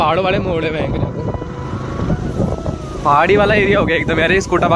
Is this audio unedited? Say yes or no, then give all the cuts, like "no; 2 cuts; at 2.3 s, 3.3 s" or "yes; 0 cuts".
yes; 0 cuts